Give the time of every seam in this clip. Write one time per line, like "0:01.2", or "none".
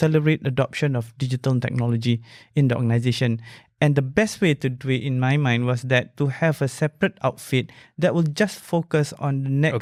none